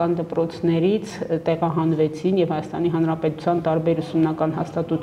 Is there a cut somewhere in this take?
no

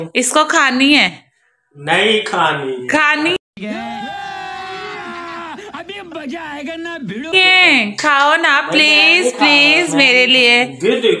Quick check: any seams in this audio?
yes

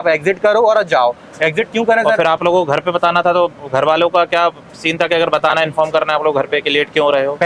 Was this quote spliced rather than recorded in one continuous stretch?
no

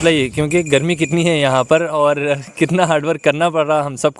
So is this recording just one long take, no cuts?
yes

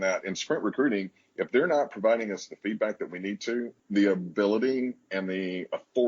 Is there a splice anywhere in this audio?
yes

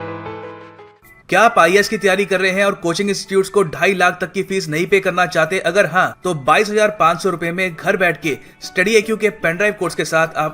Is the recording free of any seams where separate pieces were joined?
no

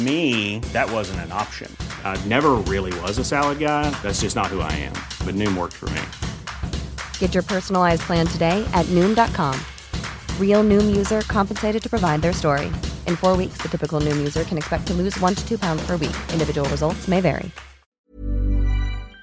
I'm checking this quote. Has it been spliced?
yes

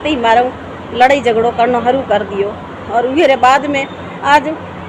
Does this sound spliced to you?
no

